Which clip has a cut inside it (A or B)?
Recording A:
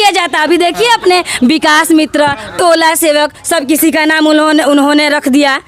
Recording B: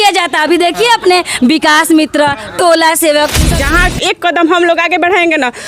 B